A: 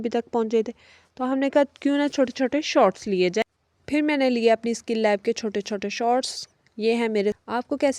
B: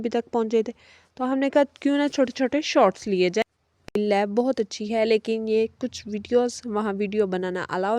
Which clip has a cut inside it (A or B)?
B